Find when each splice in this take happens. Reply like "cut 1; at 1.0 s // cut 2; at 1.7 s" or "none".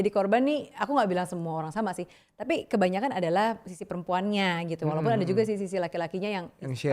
none